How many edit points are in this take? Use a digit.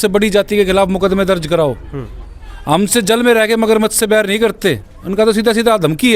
0